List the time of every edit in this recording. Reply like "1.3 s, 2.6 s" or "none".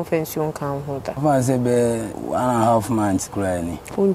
1.1 s, 2.1 s

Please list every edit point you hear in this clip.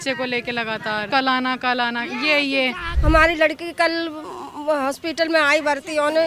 1.1 s, 2.9 s

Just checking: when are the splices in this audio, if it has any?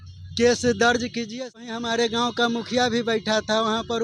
1.6 s

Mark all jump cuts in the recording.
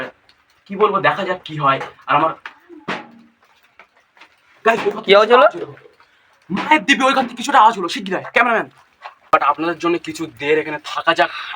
9.2 s

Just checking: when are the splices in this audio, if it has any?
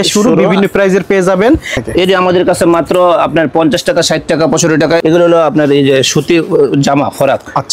1.8 s, 5.0 s

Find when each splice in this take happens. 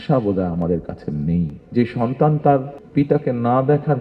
1.6 s, 2.8 s

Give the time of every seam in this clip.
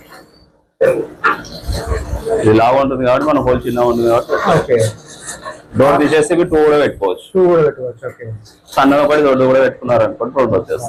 none

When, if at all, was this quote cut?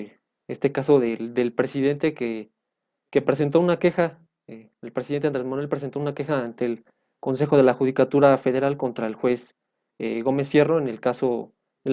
none

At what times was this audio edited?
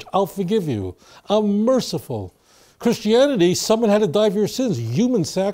none

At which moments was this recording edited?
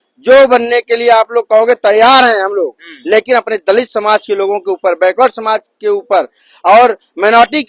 none

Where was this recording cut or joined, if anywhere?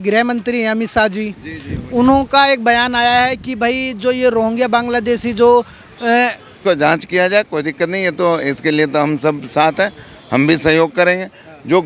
6.5 s

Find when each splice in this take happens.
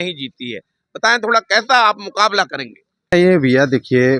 3.1 s

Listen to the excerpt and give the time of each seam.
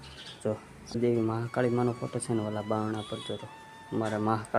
1.0 s

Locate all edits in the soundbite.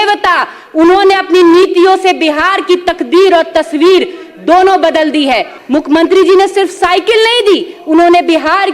5.5 s

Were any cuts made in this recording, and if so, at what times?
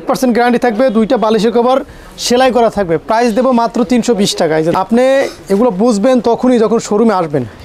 4.7 s

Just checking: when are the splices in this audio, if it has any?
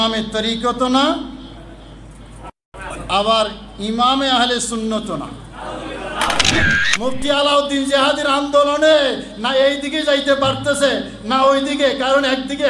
6.6 s

